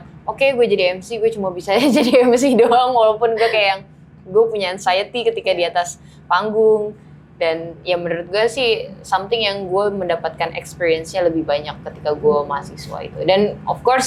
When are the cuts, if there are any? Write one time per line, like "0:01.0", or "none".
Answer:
none